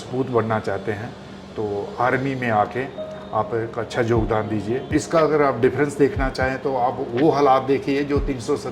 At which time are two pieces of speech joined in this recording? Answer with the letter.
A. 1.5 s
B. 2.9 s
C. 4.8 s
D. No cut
C